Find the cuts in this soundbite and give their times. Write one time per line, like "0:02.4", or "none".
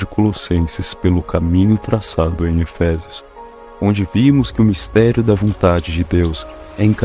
0:04.1